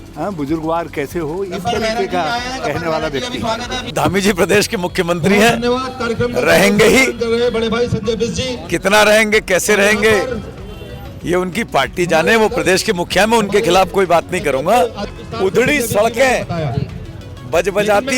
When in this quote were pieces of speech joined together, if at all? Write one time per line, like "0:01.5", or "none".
0:03.9
0:15.0